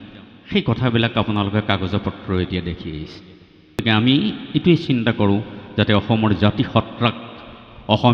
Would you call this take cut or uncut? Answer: cut